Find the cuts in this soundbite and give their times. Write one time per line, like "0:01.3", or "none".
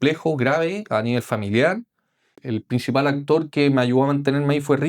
0:02.4